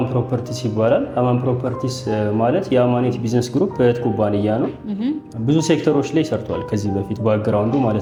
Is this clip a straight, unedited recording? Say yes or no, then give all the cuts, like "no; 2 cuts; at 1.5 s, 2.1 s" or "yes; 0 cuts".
yes; 0 cuts